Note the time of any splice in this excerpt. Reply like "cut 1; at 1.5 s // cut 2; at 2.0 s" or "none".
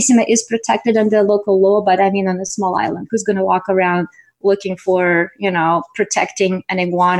none